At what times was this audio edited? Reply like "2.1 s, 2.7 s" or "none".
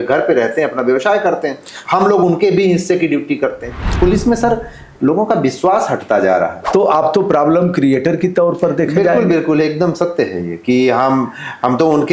3.9 s, 6.6 s